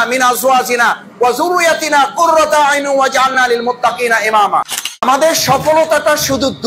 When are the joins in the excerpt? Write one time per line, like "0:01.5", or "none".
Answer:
0:04.7